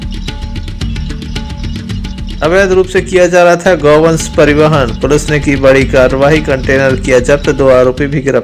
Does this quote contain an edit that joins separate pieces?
yes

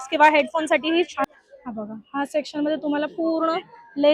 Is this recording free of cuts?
no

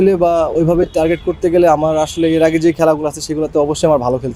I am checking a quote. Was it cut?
no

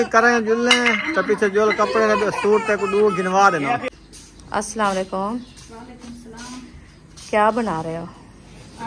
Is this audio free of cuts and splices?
no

